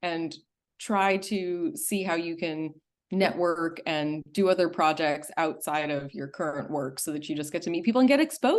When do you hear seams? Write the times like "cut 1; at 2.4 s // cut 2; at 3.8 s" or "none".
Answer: none